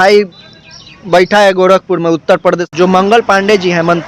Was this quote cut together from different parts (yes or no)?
yes